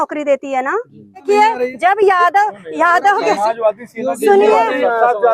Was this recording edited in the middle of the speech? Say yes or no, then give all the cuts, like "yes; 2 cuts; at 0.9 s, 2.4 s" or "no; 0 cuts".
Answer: yes; 1 cut; at 1.2 s